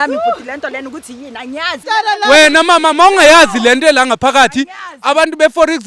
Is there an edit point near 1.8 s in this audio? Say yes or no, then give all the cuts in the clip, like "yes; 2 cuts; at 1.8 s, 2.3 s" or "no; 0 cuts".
yes; 1 cut; at 1.8 s